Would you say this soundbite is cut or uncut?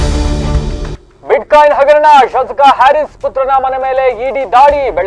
uncut